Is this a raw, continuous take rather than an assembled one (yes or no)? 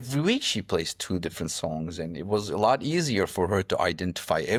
yes